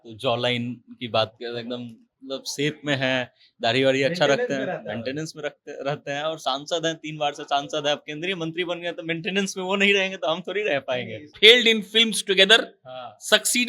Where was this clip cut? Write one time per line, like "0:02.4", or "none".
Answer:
0:11.3

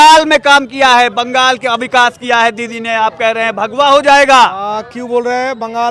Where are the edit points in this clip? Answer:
none

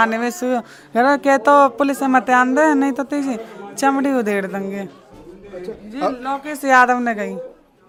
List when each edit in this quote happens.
none

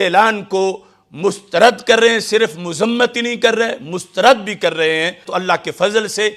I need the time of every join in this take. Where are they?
0:05.3

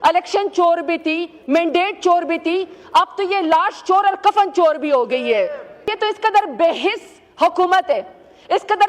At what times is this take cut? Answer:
0:05.9

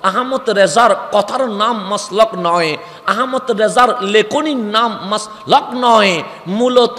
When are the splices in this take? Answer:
none

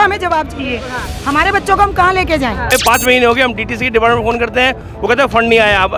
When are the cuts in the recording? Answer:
0:02.7

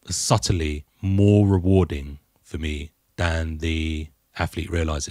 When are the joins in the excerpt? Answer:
0:00.9
0:03.0
0:04.2

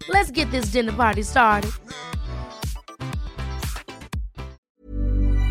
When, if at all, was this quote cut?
0:04.6

